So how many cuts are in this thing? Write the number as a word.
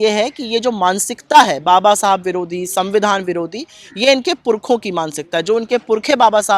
zero